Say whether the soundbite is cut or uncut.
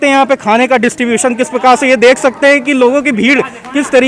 uncut